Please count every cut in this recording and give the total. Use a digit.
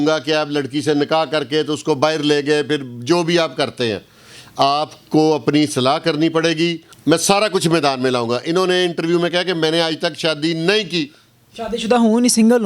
1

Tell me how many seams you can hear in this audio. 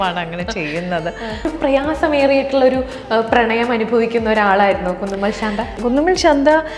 2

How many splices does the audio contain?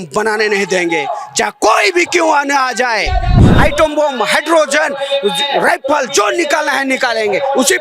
1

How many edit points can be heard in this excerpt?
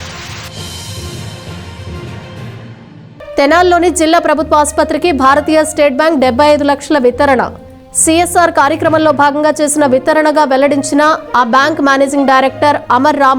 1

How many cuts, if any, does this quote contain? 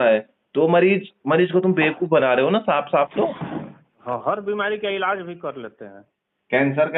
1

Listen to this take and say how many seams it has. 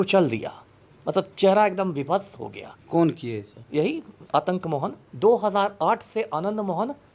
1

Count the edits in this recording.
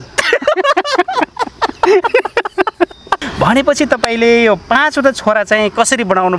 1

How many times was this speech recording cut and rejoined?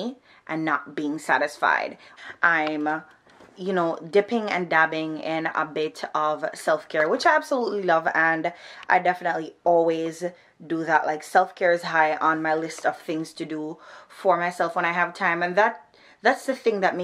1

